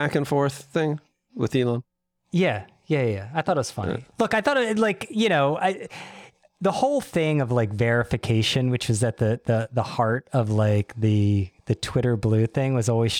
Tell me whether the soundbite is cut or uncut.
uncut